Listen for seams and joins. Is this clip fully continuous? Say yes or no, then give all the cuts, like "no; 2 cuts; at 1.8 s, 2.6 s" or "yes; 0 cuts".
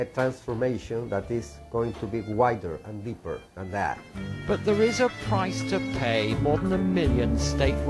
no; 1 cut; at 6.7 s